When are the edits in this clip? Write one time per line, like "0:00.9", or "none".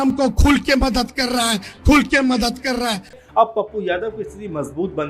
0:03.1